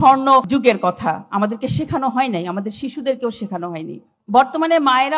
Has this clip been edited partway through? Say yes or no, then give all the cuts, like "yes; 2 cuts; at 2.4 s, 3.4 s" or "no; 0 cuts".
no; 0 cuts